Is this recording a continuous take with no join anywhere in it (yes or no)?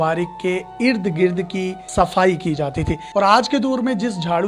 no